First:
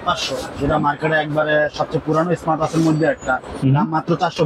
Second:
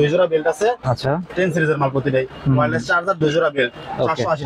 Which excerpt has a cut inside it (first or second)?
second